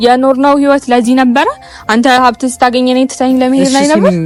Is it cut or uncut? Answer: uncut